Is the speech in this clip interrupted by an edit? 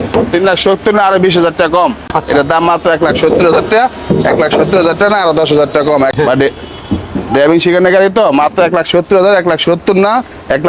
yes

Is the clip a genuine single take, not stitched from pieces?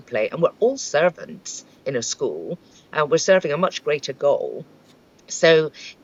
yes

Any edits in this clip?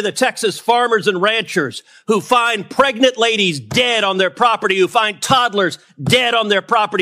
no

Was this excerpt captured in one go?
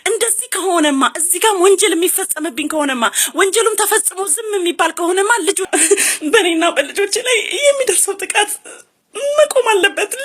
no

